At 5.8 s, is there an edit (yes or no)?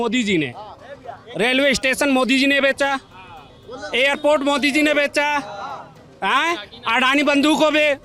no